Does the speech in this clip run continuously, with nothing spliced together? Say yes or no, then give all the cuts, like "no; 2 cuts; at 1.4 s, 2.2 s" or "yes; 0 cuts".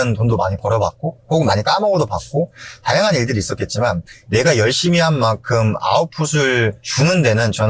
no; 1 cut; at 4.1 s